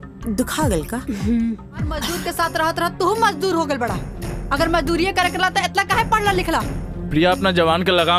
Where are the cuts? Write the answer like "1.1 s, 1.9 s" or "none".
2.1 s